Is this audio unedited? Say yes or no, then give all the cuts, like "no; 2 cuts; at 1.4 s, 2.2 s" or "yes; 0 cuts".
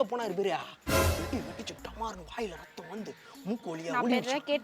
yes; 0 cuts